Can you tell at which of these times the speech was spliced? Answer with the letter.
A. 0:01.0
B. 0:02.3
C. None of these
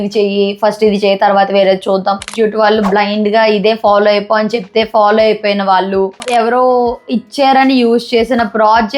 B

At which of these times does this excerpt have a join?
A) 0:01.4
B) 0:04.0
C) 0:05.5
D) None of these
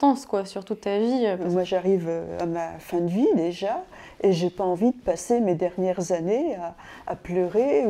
A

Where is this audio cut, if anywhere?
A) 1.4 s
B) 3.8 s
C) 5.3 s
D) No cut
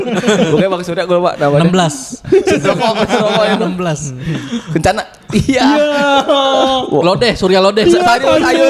D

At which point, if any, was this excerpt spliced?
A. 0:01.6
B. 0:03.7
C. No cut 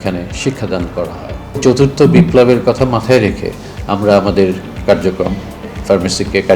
A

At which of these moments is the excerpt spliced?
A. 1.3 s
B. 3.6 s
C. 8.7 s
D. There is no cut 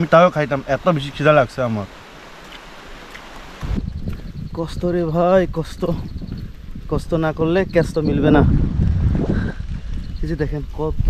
B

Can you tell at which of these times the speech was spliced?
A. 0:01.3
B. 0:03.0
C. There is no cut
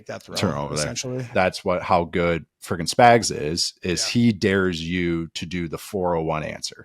A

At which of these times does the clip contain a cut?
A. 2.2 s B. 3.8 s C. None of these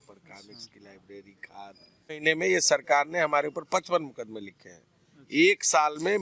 A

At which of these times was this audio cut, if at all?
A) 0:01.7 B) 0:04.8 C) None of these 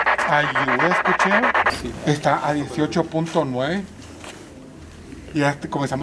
A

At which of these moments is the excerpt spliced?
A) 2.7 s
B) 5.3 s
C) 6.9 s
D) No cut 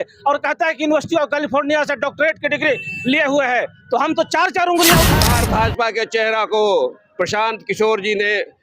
B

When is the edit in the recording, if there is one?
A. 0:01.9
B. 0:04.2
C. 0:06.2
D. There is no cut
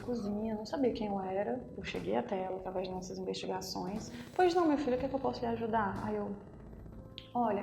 B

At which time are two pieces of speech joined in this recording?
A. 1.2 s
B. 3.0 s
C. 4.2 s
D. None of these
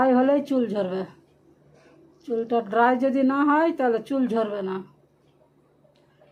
D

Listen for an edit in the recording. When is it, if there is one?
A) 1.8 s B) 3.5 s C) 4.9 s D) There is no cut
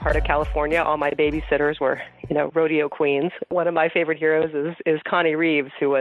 B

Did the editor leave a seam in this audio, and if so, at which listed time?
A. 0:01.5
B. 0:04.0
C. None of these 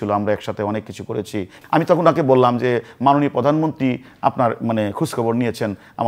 A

